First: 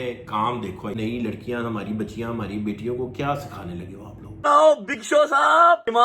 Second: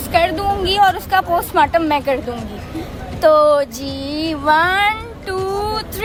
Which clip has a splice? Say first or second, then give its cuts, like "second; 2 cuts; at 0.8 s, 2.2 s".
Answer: first; 2 cuts; at 1.0 s, 4.4 s